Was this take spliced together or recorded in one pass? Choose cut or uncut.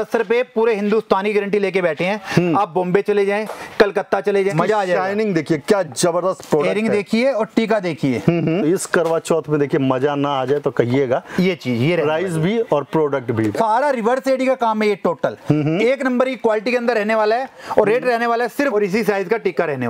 cut